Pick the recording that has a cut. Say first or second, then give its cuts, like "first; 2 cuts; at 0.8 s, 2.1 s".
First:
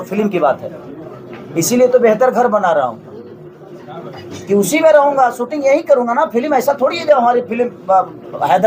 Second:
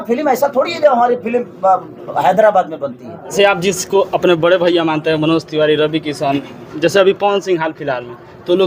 second; 1 cut; at 3.3 s